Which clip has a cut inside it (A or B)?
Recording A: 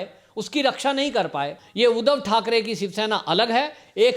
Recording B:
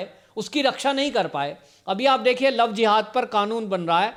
A